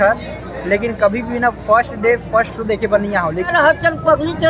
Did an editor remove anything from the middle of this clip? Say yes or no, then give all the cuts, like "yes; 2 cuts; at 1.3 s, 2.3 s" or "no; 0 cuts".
yes; 1 cut; at 3.5 s